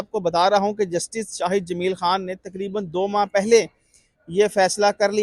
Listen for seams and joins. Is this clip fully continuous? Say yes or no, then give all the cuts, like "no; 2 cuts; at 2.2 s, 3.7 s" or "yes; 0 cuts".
yes; 0 cuts